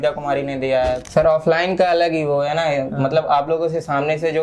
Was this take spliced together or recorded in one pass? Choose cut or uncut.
cut